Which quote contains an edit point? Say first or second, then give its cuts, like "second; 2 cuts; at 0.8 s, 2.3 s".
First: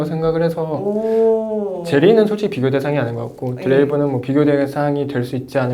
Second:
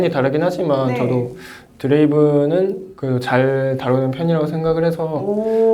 second; 1 cut; at 2.9 s